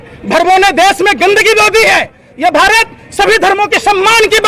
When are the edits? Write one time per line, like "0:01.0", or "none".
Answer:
none